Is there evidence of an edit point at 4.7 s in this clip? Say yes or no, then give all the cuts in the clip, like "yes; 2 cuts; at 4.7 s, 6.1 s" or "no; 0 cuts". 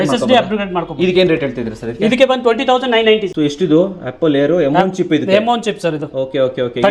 no; 1 cut; at 3.3 s